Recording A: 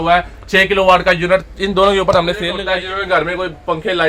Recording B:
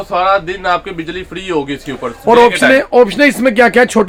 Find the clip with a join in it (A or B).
A